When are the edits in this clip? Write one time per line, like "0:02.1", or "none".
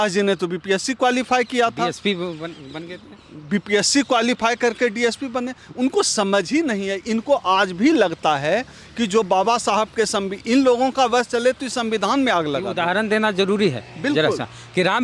none